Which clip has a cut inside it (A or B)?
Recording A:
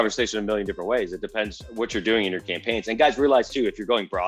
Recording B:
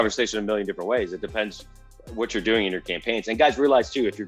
A